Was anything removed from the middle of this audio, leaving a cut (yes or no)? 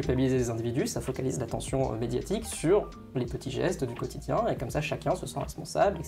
no